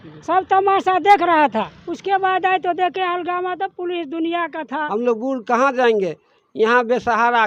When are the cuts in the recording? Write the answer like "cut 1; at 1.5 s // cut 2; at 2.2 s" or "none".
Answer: cut 1; at 1.7 s // cut 2; at 4.7 s